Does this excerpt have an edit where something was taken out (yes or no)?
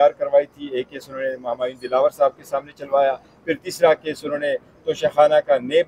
no